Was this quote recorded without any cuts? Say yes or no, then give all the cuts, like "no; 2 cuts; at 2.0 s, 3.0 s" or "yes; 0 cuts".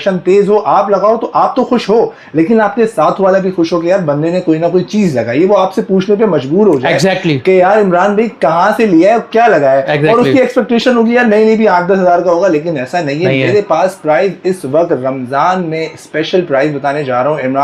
yes; 0 cuts